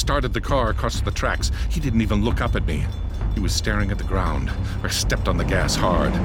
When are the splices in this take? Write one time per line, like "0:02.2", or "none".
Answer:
none